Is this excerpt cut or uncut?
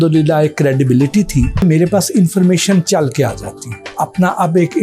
cut